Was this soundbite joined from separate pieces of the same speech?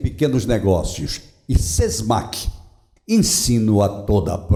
no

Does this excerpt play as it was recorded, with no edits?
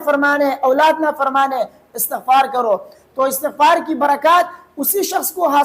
no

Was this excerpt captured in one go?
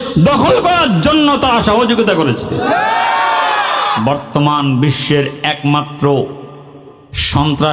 no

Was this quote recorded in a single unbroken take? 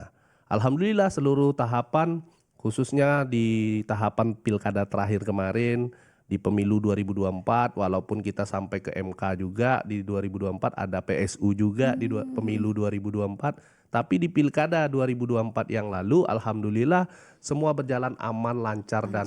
yes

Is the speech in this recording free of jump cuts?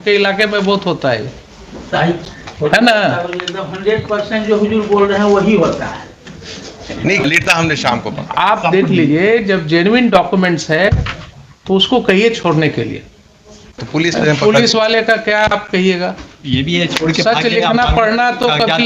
no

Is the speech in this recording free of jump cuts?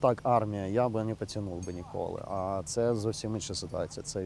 yes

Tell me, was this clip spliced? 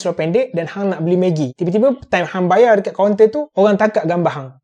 no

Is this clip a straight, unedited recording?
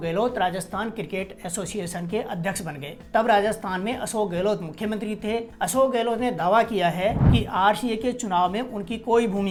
yes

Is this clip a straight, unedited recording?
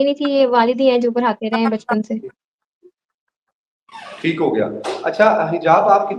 yes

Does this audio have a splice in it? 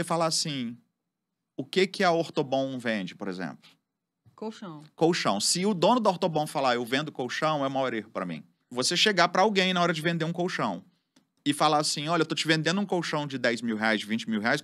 no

